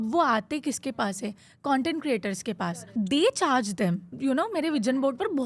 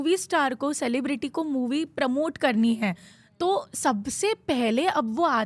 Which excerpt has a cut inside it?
first; 2 cuts; at 2.8 s, 4.1 s

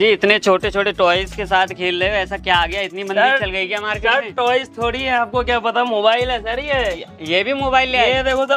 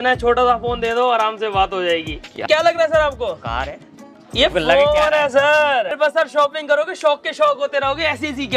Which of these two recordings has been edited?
second; 2 cuts; at 2.4 s, 5.9 s

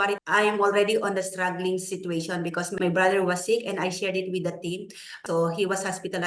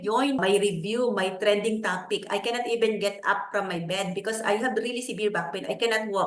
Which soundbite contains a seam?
first; 1 cut; at 2.7 s

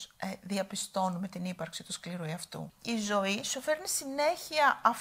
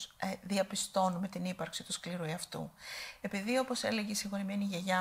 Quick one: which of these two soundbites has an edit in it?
first; 1 cut; at 2.7 s

